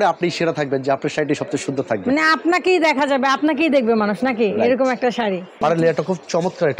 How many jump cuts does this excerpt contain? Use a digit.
1